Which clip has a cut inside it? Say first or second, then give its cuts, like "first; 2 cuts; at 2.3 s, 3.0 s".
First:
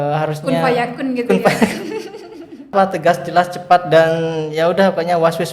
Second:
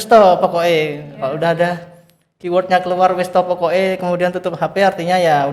first; 1 cut; at 2.7 s